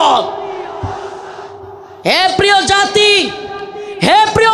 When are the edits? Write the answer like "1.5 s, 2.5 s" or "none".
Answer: 1.8 s